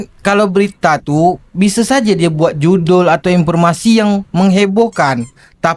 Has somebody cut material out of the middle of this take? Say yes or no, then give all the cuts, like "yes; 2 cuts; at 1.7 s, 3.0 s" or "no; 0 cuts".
no; 0 cuts